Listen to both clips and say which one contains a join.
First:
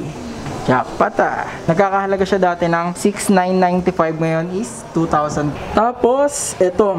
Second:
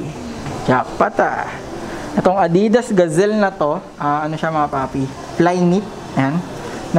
first; 3 cuts; at 1.6 s, 2.9 s, 5.5 s

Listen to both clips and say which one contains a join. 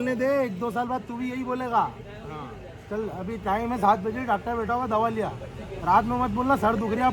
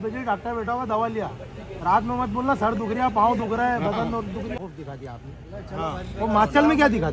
second; 1 cut; at 4.6 s

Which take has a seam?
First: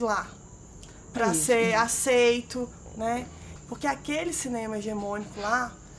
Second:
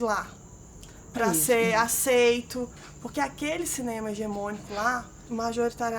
second; 2 cuts; at 2.8 s, 5.3 s

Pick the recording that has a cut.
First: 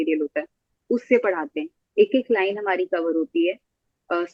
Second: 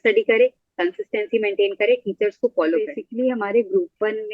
second; 1 cut; at 3.0 s

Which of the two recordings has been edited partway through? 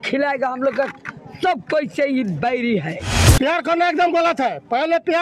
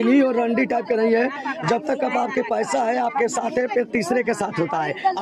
first; 1 cut; at 3.2 s

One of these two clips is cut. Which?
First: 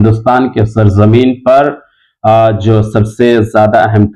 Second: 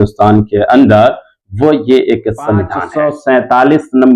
second; 1 cut; at 2.8 s

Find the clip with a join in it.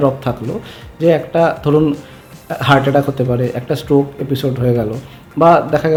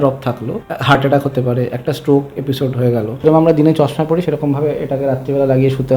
second; 2 cuts; at 1.0 s, 3.2 s

